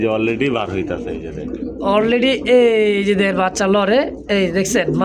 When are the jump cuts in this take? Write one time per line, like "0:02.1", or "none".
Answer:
none